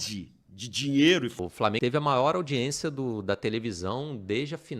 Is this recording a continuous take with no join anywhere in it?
no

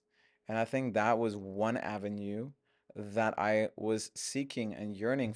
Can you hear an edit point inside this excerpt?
no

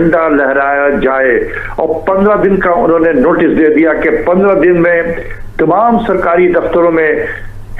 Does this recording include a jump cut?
no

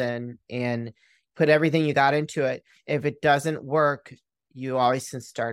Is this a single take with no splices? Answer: yes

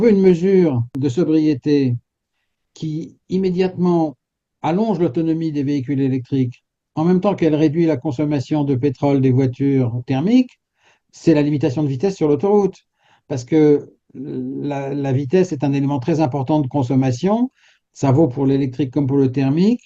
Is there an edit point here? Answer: yes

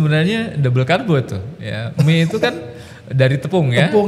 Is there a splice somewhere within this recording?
no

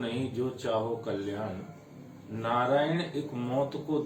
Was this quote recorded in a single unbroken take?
yes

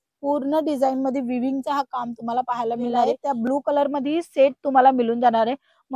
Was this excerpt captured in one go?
no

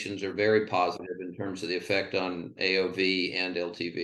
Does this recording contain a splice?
no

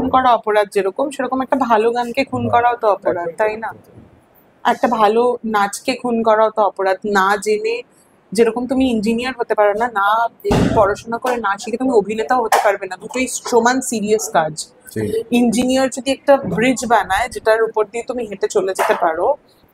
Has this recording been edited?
no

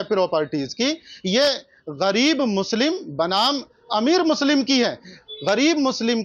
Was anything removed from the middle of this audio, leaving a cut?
no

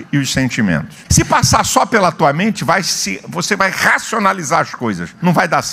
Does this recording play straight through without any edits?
no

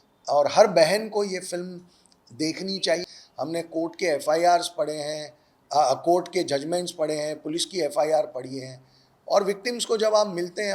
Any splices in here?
yes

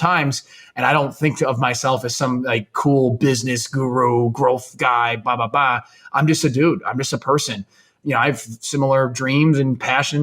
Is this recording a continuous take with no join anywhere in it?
no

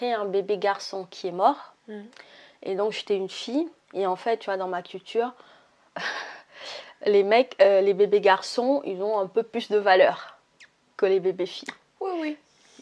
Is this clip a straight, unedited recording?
yes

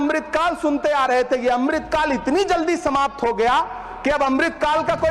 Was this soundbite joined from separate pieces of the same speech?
no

